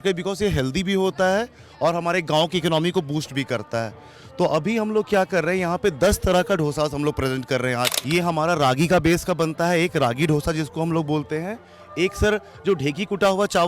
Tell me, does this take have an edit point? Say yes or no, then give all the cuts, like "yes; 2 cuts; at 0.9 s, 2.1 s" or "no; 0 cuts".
yes; 1 cut; at 8.0 s